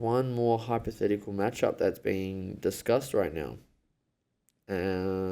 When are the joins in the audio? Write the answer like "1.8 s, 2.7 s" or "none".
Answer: none